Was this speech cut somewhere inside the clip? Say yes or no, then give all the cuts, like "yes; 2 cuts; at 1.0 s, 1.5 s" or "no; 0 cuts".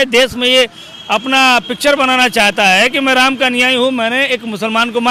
no; 0 cuts